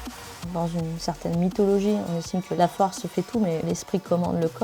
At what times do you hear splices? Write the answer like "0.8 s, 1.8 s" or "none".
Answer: 3.6 s